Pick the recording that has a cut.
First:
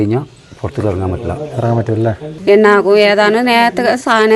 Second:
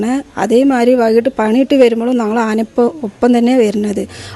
first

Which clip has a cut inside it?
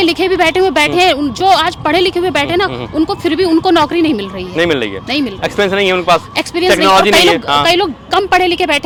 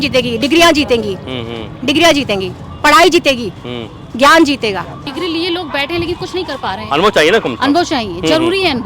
second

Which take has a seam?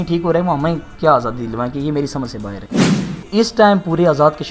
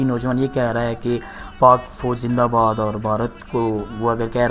first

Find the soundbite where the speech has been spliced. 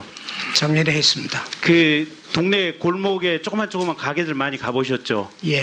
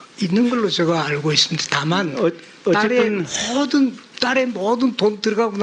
second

